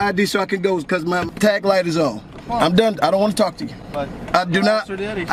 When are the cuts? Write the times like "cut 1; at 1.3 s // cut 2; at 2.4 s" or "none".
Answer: cut 1; at 1.3 s // cut 2; at 2.3 s

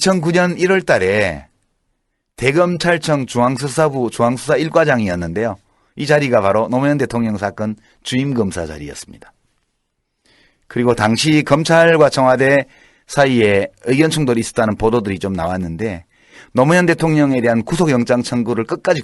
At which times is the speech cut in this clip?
none

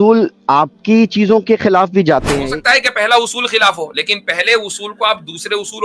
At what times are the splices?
cut 1; at 2.4 s

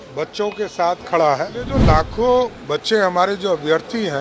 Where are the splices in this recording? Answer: cut 1; at 1.8 s

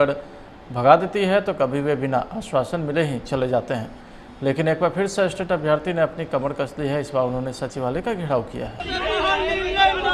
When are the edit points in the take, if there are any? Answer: none

